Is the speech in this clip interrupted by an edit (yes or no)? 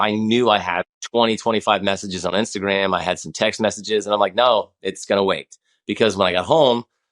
yes